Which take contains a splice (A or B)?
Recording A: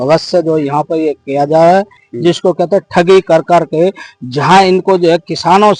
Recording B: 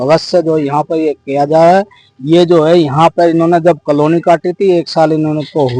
A